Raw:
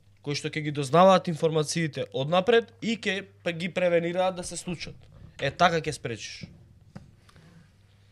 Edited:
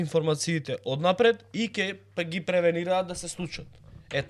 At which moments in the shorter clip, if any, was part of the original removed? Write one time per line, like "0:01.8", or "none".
none